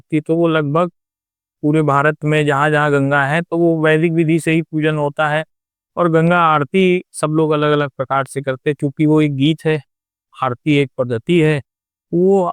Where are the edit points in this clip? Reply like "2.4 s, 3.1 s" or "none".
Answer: none